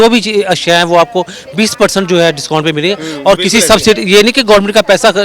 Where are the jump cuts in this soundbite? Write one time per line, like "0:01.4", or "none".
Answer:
none